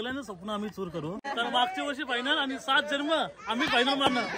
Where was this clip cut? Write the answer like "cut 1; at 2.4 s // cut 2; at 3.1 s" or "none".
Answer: cut 1; at 1.2 s